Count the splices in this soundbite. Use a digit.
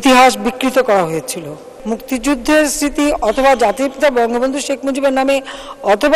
1